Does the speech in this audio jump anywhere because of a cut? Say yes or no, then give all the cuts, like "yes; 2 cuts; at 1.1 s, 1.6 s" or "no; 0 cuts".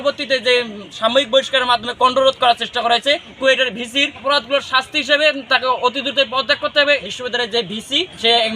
yes; 1 cut; at 7.0 s